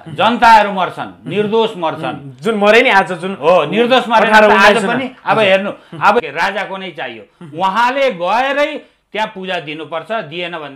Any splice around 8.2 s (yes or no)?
no